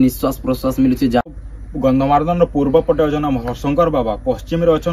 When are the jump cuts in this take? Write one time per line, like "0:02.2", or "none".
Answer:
0:01.3